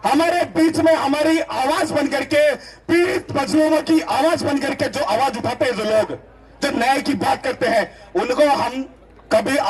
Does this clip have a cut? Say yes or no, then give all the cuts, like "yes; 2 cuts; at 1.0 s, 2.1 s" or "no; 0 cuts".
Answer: no; 0 cuts